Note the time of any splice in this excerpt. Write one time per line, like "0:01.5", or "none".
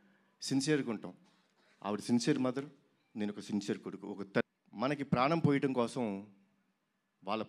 0:04.4